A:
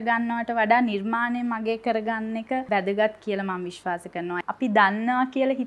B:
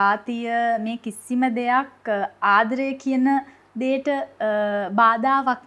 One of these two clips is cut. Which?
A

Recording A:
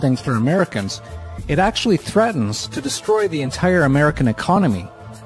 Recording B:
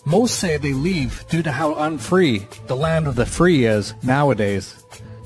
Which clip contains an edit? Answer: B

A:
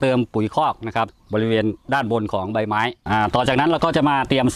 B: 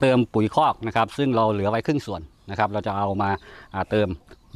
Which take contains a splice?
A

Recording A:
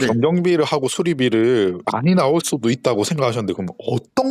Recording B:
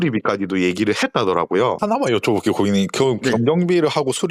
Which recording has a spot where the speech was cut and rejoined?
B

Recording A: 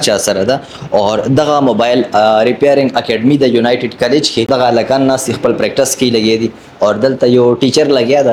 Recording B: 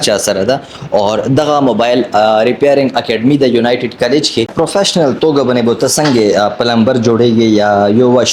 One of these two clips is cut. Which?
B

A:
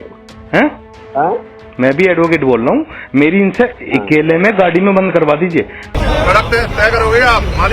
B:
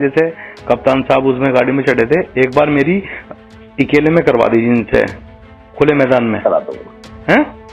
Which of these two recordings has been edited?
A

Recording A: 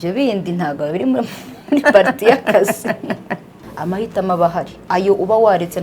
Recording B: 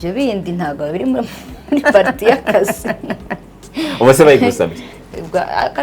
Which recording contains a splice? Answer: A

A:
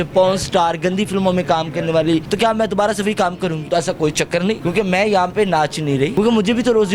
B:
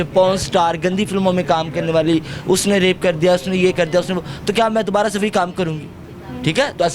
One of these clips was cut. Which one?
A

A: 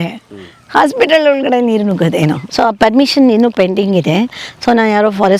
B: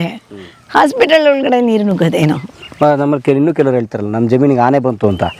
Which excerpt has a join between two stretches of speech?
A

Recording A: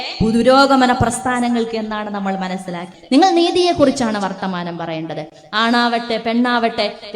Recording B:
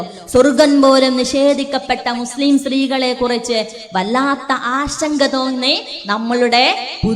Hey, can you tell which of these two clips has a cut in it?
A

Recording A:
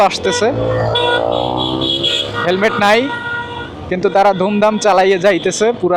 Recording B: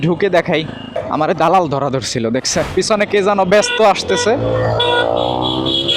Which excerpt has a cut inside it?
B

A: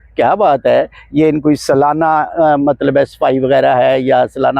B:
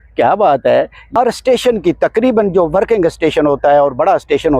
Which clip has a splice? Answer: B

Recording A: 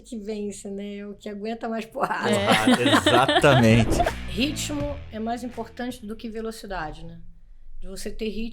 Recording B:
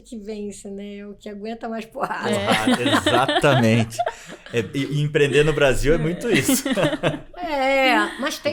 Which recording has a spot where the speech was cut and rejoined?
A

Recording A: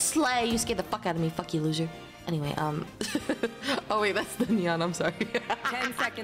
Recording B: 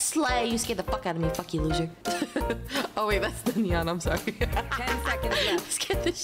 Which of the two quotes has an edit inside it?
B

